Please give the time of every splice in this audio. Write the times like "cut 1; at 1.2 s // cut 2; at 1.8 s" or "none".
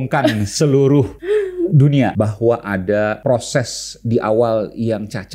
cut 1; at 1.2 s // cut 2; at 2.1 s // cut 3; at 3.2 s

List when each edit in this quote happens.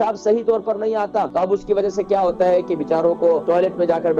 cut 1; at 1.3 s // cut 2; at 3.4 s

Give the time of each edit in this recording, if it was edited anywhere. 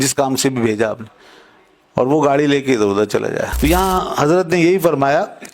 cut 1; at 3.5 s

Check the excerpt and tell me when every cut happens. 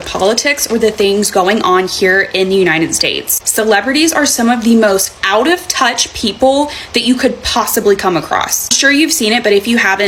none

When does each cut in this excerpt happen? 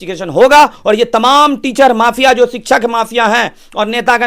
none

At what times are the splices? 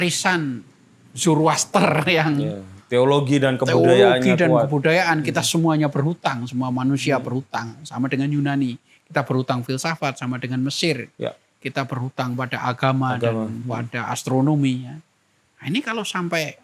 none

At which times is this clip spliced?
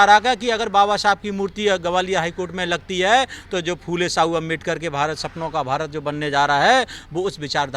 none

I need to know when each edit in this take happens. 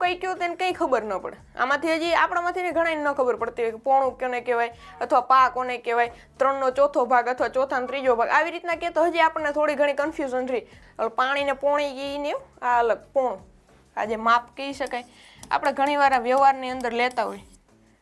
cut 1; at 10.7 s

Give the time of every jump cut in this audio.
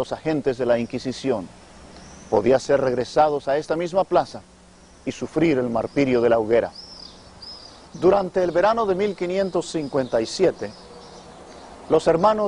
none

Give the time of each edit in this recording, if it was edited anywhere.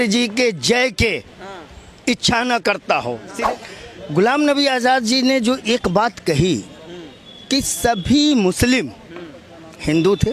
cut 1; at 3.3 s

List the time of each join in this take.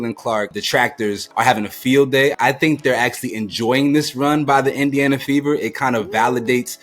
cut 1; at 1.2 s // cut 2; at 2.4 s

